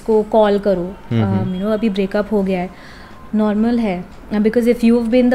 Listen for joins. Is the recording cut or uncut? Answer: uncut